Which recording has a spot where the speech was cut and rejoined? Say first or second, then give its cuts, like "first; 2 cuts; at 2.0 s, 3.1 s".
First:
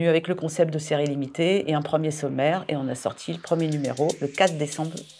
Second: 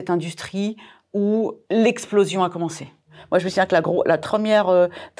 second; 3 cuts; at 1.6 s, 3.1 s, 4.2 s